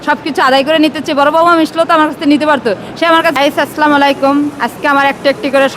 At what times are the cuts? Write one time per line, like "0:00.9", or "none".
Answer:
0:03.4